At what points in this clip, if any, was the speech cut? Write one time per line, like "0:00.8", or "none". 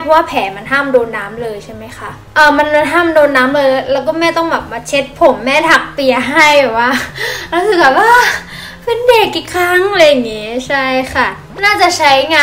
none